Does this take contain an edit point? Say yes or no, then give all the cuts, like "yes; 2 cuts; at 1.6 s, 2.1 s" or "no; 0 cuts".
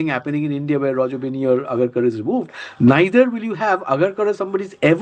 no; 0 cuts